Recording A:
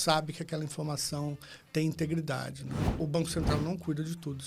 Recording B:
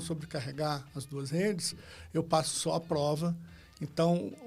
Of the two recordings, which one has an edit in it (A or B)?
A